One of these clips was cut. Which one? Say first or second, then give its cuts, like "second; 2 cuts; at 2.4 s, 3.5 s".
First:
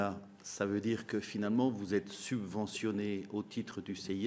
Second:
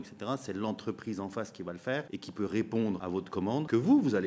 second; 2 cuts; at 2.1 s, 3.4 s